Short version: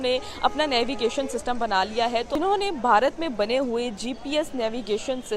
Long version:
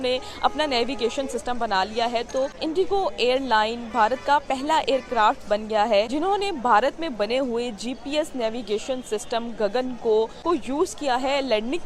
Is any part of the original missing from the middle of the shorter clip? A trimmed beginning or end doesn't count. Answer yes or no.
yes